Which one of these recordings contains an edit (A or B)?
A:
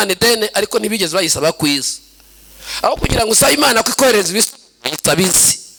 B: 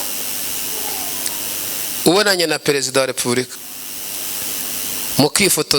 B